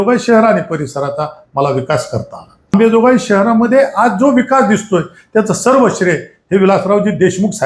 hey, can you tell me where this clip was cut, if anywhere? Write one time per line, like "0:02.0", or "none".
0:02.7